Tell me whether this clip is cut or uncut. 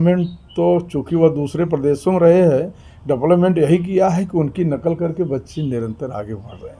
uncut